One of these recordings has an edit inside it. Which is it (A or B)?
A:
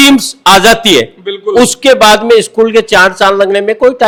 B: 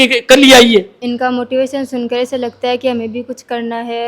B